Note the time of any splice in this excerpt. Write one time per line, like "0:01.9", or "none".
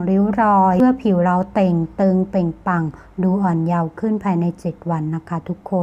none